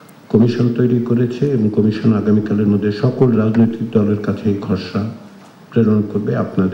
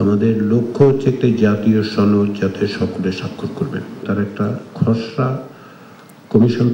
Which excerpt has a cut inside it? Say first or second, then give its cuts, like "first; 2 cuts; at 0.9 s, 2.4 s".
second; 1 cut; at 4.0 s